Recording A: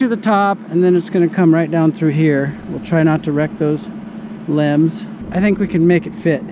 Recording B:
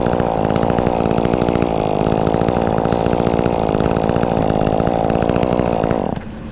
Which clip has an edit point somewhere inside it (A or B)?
A